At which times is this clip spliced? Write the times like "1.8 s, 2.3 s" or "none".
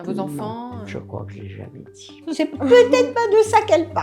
0.9 s, 2.3 s

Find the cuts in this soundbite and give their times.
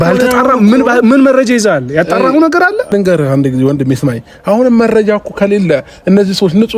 2.9 s

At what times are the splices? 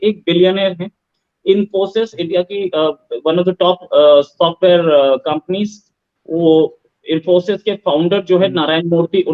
none

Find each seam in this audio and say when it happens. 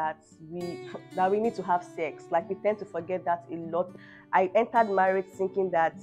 4.0 s

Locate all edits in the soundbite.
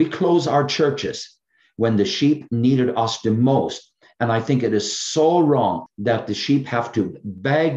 5.9 s

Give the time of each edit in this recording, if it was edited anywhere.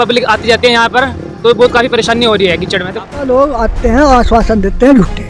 3.2 s

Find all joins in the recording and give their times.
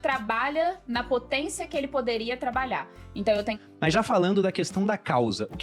3.6 s

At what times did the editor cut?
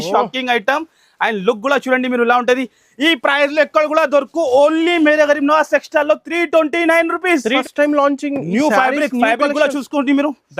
7.6 s

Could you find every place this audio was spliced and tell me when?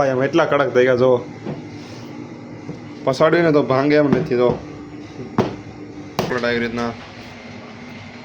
6.3 s

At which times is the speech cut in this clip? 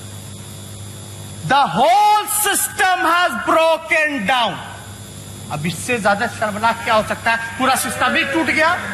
none

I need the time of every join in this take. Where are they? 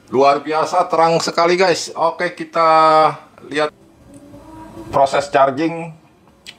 3.7 s

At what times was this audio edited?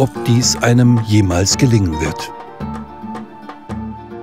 2.1 s

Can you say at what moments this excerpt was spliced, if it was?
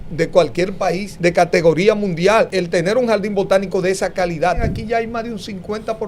1.1 s, 2.6 s, 4.6 s

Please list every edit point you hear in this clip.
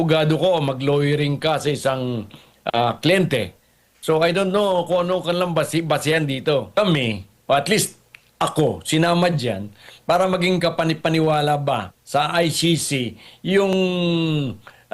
6.7 s

